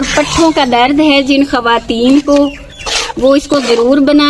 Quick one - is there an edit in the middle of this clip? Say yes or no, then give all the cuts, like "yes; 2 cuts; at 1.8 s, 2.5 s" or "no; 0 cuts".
no; 0 cuts